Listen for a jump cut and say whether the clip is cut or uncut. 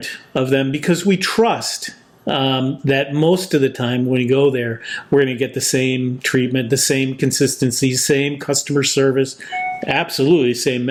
uncut